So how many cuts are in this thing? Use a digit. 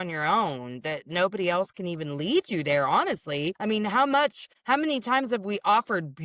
2